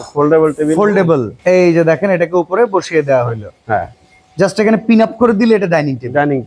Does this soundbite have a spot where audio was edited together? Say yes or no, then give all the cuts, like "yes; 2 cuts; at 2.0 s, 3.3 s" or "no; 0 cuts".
yes; 1 cut; at 1.3 s